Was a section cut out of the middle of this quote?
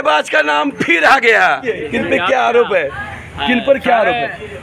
yes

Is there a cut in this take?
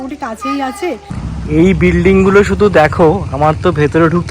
yes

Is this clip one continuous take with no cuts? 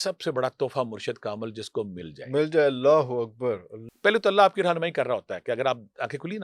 no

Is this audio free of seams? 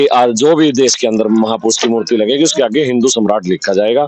yes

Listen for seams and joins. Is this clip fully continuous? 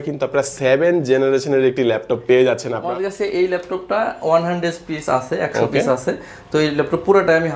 yes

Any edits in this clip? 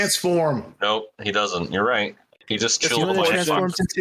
yes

